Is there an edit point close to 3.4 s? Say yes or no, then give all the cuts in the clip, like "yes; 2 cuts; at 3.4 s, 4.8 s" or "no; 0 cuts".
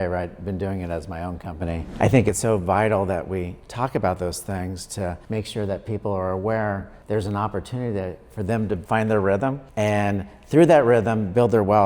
no; 5 cuts; at 1.8 s, 5.2 s, 6.9 s, 8.8 s, 9.6 s